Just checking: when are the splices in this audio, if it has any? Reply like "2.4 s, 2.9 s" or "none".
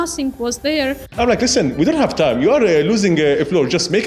1.1 s